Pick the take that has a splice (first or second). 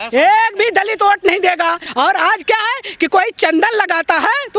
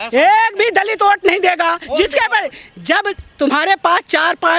first